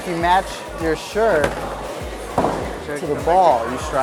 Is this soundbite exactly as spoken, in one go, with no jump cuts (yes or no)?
yes